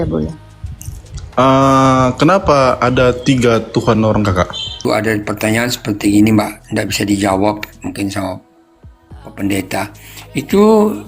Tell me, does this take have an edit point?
yes; 1 cut; at 4.7 s

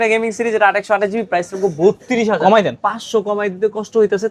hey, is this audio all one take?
yes; 0 cuts

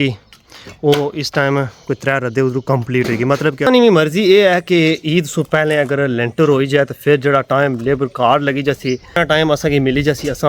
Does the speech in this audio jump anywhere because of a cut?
yes; 2 cuts; at 3.7 s, 9.1 s

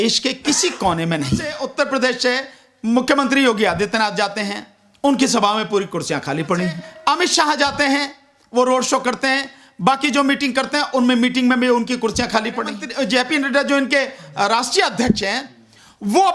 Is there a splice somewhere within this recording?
yes; 3 cuts; at 1.6 s, 6.9 s, 12.8 s

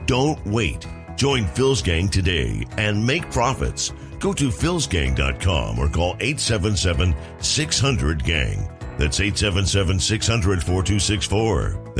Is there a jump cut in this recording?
no; 0 cuts

